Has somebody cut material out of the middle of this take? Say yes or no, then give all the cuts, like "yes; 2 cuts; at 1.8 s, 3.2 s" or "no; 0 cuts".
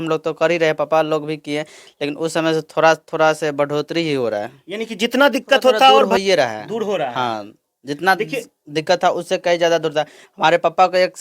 yes; 1 cut; at 6.1 s